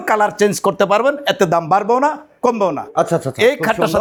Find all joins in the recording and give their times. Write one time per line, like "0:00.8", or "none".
none